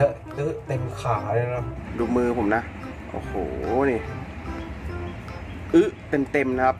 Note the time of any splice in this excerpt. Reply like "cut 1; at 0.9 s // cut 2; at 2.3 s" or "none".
cut 1; at 1.8 s